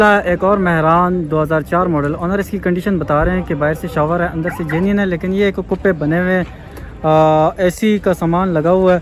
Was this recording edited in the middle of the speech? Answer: no; 0 cuts

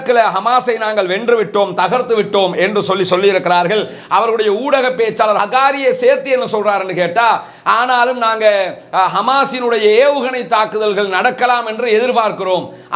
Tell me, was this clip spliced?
yes; 1 cut; at 5.4 s

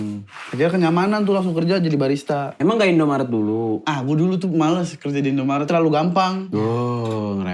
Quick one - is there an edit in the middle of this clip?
yes; 4 cuts; at 2.6 s, 3.8 s, 5.7 s, 6.4 s

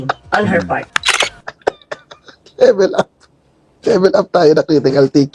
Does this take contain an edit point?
yes; 1 cut; at 1.0 s

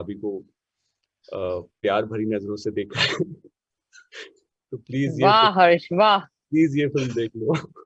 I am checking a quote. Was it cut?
no; 0 cuts

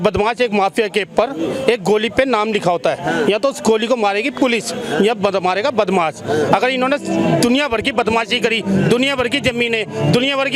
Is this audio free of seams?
yes; 0 cuts

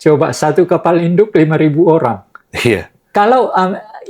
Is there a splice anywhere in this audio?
yes; 1 cut; at 3.0 s

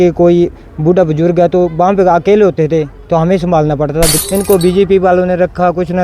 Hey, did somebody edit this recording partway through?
yes; 1 cut; at 4.2 s

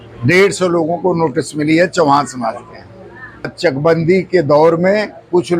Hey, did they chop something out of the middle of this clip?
yes; 1 cut; at 3.5 s

